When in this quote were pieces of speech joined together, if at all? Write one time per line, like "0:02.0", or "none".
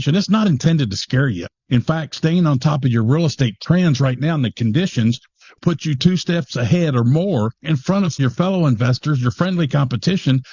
0:01.4
0:05.6
0:08.2